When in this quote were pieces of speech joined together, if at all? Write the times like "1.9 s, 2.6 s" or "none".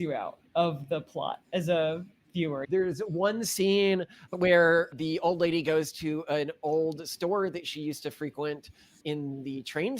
2.6 s, 4.2 s